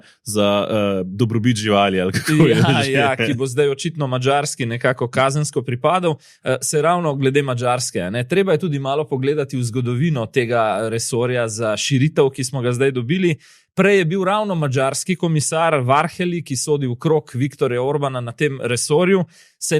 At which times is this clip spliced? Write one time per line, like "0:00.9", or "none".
none